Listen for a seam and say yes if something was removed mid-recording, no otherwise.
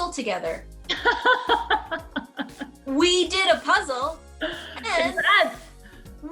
no